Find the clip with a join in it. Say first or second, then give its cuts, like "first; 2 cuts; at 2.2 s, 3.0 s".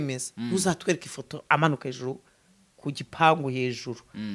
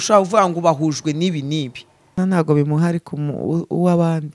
second; 1 cut; at 2.2 s